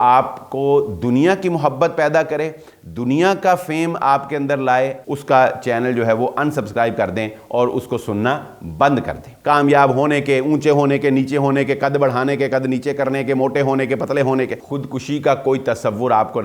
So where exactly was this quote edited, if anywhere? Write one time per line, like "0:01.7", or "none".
0:05.1
0:09.3
0:14.6